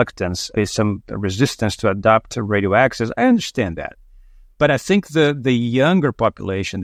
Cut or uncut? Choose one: uncut